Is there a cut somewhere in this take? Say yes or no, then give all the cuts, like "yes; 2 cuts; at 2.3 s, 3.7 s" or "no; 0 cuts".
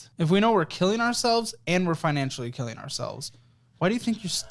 no; 0 cuts